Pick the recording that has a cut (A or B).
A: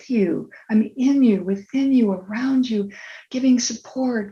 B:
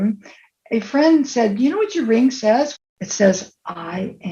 B